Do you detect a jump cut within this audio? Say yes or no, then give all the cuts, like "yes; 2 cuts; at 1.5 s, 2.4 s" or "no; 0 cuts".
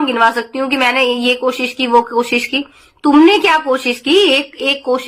no; 0 cuts